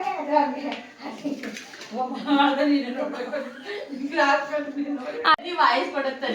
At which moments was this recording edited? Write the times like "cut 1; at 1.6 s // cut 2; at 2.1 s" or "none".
cut 1; at 5.4 s